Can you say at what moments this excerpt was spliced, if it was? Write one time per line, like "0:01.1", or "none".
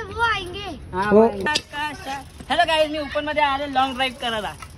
0:01.4